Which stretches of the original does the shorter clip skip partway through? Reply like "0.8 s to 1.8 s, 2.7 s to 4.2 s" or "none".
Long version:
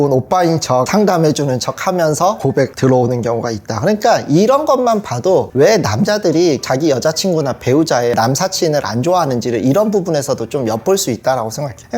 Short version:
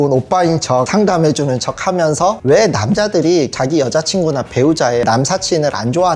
2.4 s to 5.5 s